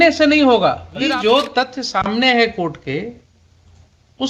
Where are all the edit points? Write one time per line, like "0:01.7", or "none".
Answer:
0:01.0